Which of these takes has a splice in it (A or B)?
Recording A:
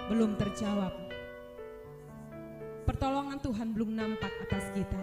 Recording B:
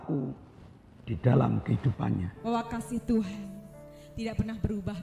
B